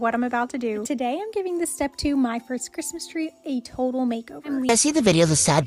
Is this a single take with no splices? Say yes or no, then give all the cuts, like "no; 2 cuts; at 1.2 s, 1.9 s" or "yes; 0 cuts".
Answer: no; 1 cut; at 4.7 s